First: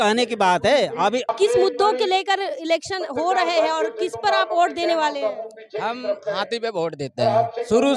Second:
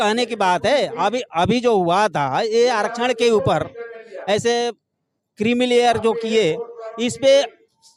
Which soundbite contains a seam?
first; 1 cut; at 1.3 s

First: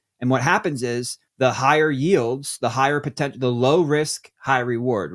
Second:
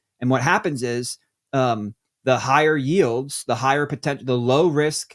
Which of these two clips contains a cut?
first; 1 cut; at 1.2 s

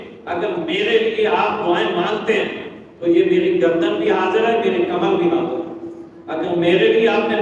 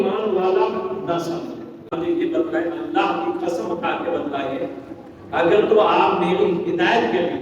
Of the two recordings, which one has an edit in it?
second; 1 cut; at 1.9 s

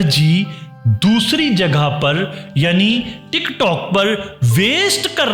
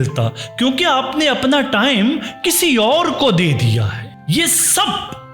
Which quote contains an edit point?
second; 1 cut; at 4.2 s

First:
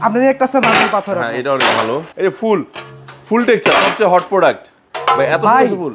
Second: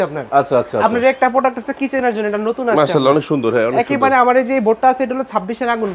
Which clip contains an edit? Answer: first; 1 cut; at 2.1 s

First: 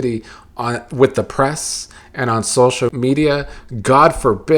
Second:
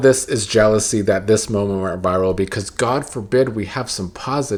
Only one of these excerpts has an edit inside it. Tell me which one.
first; 1 cut; at 2.9 s

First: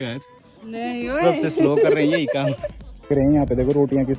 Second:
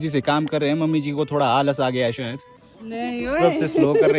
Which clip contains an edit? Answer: first; 1 cut; at 3.1 s

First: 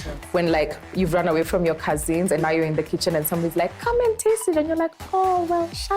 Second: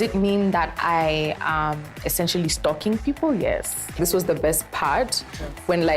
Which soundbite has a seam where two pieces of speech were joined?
second; 1 cut; at 4.0 s

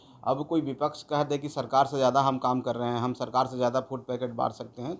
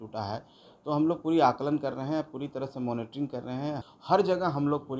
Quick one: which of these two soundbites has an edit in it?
second; 1 cut; at 3.8 s

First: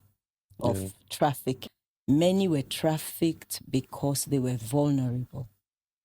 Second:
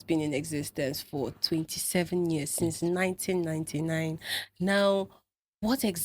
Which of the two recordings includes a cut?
first; 1 cut; at 1.7 s

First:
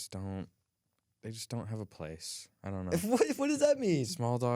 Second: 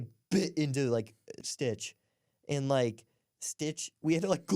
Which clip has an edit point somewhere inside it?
second; 1 cut; at 1.4 s

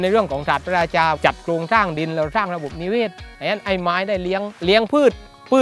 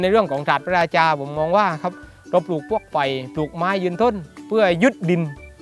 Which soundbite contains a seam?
first; 2 cuts; at 1.2 s, 4.5 s

